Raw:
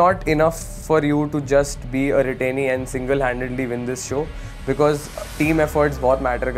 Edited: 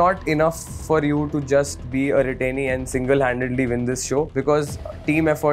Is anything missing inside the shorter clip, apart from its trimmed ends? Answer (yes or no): yes